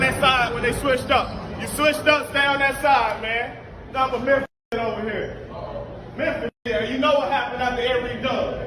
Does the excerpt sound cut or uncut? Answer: uncut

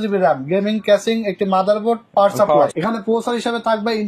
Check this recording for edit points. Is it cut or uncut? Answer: cut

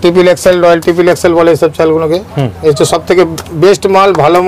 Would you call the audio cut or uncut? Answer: uncut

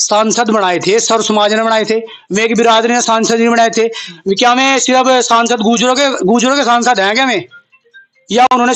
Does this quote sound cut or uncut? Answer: uncut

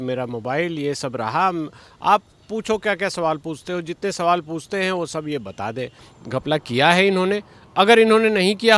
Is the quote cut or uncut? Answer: cut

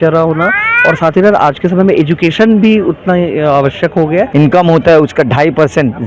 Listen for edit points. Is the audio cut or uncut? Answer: cut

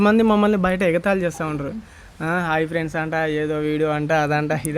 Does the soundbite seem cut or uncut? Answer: uncut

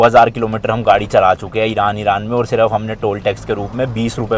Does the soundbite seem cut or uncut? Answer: uncut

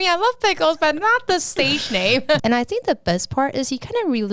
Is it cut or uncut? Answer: cut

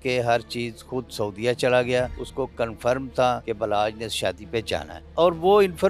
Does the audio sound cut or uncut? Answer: cut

